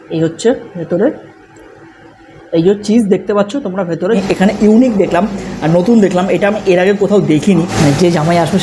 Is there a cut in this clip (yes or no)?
yes